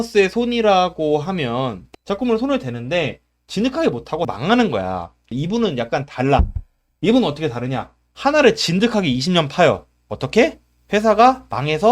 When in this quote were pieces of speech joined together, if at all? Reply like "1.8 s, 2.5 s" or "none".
1.9 s, 5.3 s